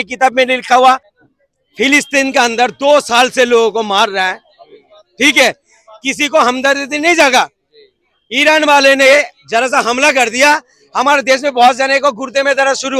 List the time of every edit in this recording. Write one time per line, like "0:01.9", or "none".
0:01.1